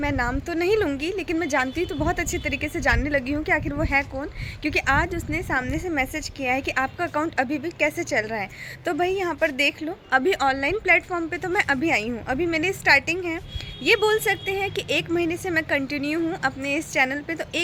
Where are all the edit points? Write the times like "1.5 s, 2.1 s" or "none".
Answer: none

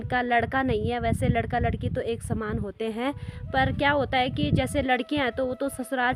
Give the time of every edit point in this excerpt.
none

